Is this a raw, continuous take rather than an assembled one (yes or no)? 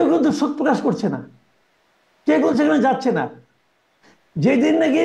yes